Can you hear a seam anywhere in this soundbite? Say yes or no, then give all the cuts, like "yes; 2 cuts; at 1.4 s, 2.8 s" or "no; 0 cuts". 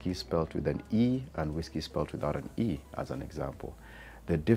no; 0 cuts